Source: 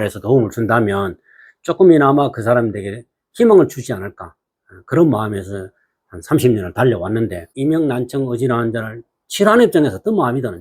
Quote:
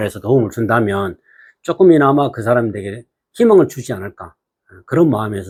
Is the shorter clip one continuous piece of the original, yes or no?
yes